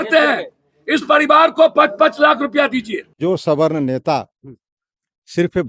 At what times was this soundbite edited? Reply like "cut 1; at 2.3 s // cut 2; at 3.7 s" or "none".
cut 1; at 3.1 s